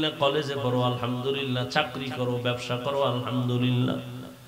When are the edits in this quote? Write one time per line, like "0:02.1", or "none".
none